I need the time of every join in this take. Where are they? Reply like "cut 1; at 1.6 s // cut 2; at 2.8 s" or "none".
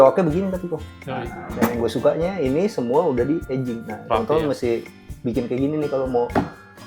none